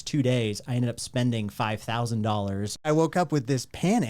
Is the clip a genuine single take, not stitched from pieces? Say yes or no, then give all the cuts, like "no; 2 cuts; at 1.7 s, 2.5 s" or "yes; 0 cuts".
no; 1 cut; at 2.9 s